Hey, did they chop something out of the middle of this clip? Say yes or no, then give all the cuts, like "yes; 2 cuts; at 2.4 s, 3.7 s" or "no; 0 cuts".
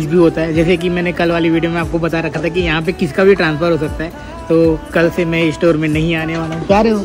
no; 0 cuts